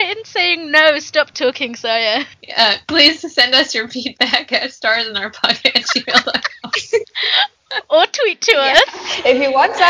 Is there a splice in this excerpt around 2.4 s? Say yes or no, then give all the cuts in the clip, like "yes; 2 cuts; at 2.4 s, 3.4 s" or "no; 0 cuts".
yes; 1 cut; at 2.4 s